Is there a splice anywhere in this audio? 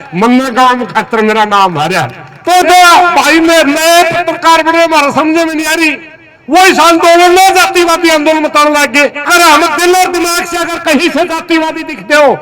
yes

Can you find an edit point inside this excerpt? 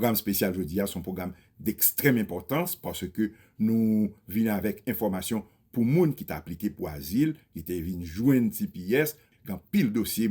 no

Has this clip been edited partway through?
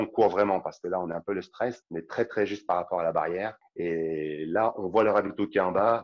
no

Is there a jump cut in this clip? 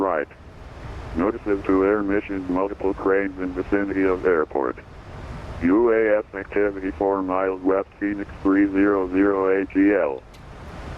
yes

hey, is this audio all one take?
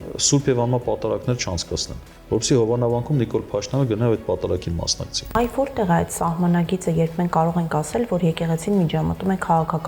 no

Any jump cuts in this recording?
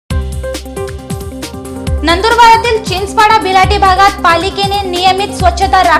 no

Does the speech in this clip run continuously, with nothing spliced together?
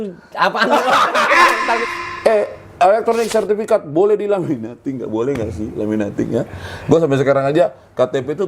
no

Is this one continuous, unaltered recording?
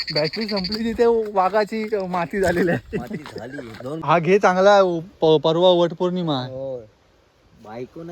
no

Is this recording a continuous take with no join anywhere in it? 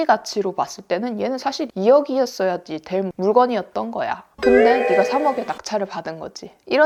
yes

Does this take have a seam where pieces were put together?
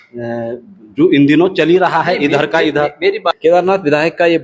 yes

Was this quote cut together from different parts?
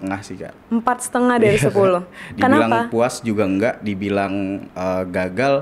no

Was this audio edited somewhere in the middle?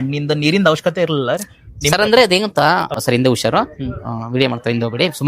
yes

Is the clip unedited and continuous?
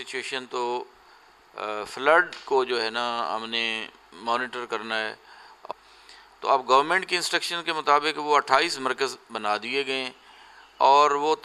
no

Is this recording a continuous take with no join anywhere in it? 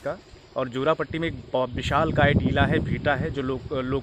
yes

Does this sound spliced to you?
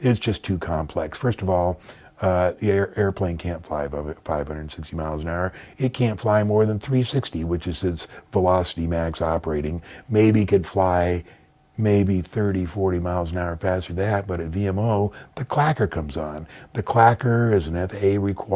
no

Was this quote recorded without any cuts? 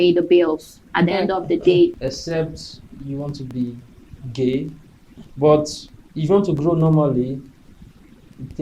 no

